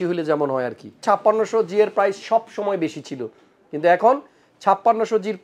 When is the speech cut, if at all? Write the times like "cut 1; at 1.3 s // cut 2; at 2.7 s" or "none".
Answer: cut 1; at 1.0 s